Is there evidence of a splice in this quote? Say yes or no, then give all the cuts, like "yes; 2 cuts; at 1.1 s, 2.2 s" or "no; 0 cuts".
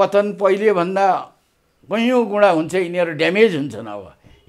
no; 0 cuts